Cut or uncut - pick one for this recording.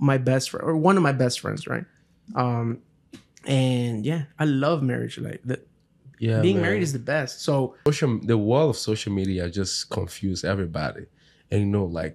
cut